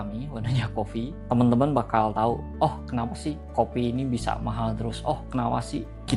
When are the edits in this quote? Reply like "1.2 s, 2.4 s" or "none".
none